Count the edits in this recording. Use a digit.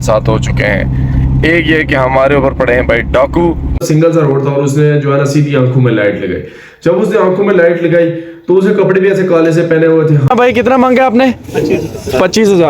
2